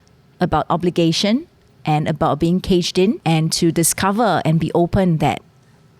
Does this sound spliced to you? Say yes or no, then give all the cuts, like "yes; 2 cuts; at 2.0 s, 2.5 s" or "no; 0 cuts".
yes; 1 cut; at 3.2 s